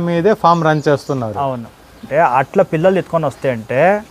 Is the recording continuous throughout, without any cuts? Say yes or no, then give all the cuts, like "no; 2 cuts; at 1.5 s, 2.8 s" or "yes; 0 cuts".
no; 1 cut; at 2.0 s